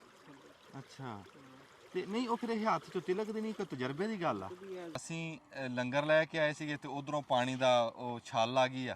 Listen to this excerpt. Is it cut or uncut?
cut